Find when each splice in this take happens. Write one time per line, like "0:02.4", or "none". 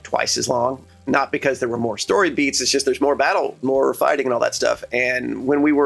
0:01.0
0:03.6